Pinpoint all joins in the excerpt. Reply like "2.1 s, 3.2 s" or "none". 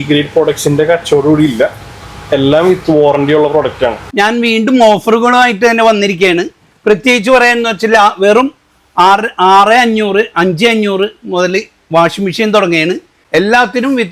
4.0 s, 13.1 s